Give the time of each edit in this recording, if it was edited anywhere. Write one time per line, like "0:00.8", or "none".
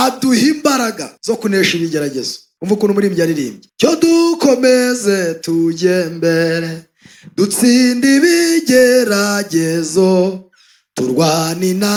none